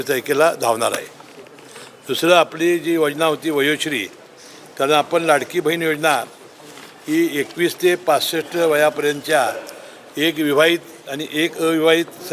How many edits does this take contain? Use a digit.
0